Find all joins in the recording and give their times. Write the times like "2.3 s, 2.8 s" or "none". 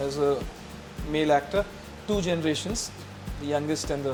none